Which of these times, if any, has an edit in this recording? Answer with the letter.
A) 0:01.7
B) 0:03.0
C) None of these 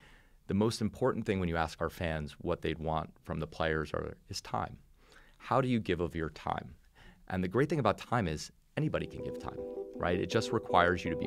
A